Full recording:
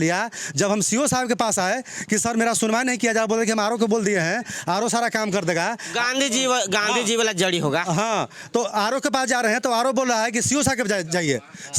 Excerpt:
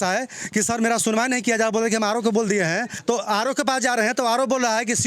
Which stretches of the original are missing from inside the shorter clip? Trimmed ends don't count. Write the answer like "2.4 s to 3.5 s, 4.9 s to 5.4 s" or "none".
4.5 s to 8.4 s